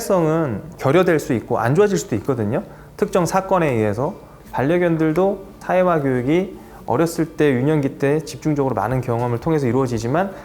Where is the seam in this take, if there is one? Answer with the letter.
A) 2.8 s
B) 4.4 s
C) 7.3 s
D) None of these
B